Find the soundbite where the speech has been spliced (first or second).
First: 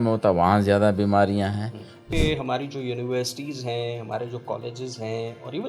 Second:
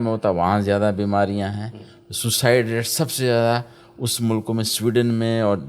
first